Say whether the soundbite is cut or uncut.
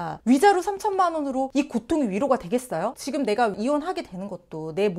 cut